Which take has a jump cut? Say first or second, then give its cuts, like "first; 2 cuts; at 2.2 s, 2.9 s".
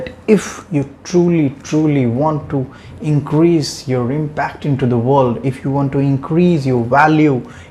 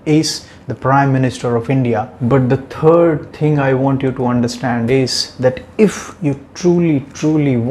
second; 1 cut; at 2.1 s